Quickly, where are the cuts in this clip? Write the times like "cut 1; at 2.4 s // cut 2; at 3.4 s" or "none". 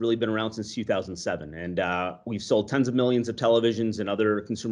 none